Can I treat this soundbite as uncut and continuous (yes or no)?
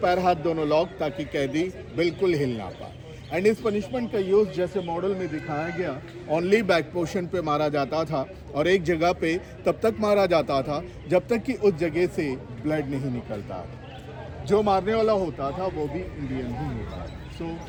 yes